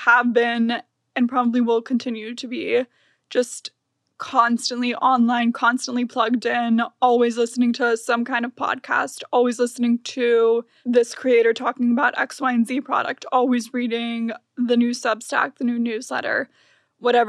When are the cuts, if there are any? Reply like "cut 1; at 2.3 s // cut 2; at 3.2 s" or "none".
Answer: cut 1; at 10.7 s